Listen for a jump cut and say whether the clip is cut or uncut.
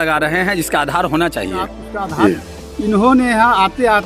cut